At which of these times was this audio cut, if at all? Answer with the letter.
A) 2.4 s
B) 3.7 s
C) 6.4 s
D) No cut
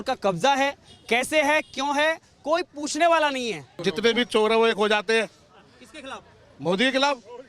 B